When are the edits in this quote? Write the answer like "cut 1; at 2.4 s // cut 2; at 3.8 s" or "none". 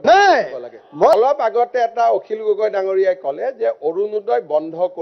cut 1; at 1.1 s